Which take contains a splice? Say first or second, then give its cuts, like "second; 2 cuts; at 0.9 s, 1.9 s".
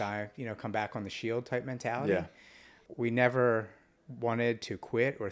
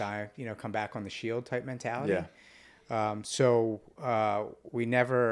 first; 1 cut; at 2.8 s